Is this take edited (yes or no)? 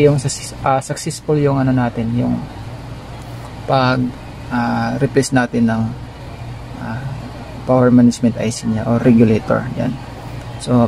yes